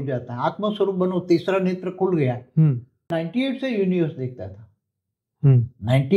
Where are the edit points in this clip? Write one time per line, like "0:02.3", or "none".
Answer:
0:03.1

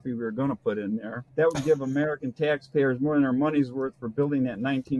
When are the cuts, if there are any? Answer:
0:01.2

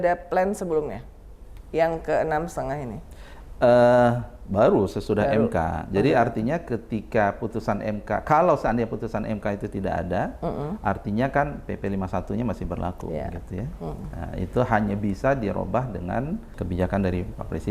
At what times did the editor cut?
0:16.6

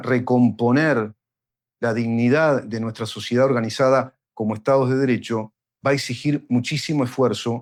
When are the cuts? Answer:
none

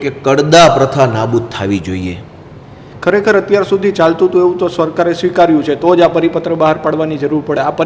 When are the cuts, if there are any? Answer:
0:02.8

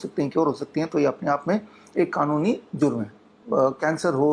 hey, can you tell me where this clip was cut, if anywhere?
0:03.3

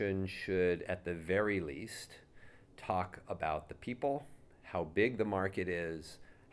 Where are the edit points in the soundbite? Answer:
none

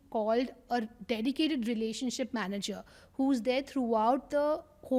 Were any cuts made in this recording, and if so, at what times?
none

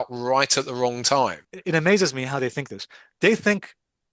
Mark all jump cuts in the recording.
0:01.5

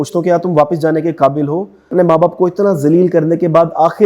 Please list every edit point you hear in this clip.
0:01.9

